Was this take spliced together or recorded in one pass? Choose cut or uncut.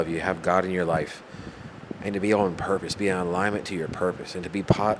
uncut